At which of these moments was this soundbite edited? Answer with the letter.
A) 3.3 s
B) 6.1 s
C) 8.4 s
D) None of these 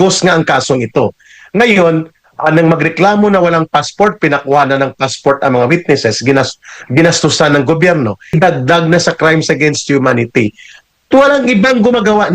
C